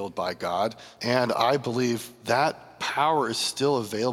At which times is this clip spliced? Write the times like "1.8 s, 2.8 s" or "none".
0.9 s, 2.1 s, 2.7 s